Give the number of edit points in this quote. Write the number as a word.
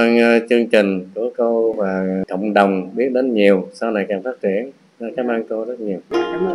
one